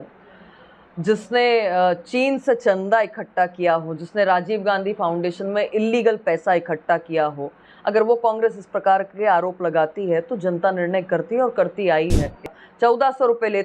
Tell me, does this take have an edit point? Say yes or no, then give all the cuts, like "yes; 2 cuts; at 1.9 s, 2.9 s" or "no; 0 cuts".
yes; 1 cut; at 12.5 s